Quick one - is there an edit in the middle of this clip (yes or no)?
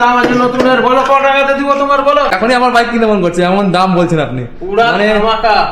yes